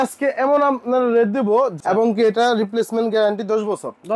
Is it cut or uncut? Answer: cut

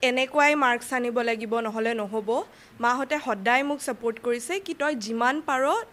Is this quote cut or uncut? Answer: uncut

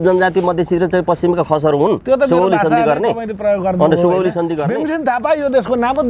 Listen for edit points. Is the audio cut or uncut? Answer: cut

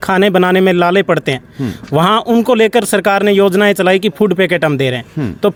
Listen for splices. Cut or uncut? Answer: uncut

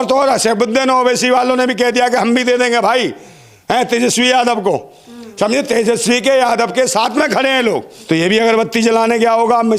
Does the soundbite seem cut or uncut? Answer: cut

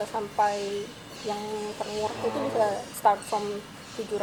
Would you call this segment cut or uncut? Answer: uncut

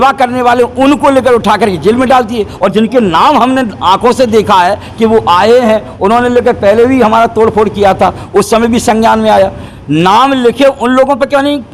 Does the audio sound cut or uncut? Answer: uncut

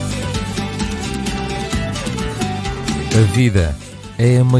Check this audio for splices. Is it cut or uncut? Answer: uncut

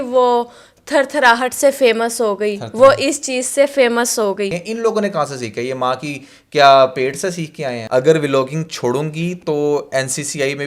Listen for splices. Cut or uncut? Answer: cut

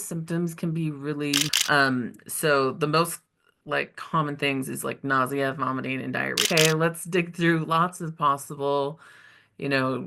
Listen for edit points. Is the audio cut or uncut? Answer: cut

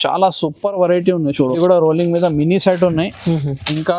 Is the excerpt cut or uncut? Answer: cut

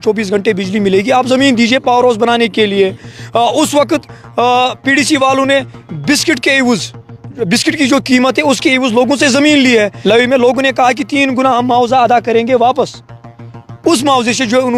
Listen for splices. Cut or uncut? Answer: uncut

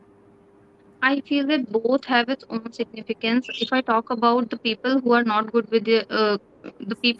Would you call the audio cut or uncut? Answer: uncut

